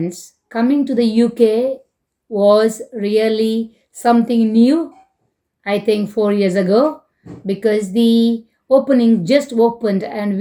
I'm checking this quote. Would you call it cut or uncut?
uncut